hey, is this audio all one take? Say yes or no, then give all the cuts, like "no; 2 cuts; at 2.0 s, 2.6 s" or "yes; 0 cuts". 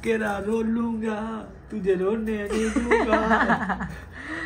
yes; 0 cuts